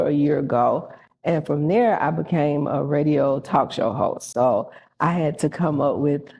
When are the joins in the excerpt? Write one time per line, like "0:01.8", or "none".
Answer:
none